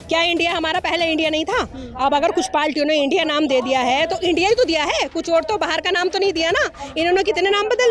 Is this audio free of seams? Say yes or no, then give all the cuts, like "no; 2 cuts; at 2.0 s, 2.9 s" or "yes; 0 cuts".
yes; 0 cuts